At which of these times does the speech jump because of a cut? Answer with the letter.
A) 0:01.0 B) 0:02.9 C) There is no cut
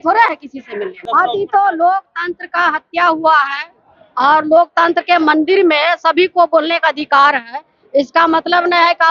A